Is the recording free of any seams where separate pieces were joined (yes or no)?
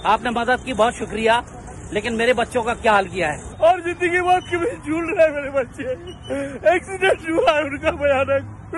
no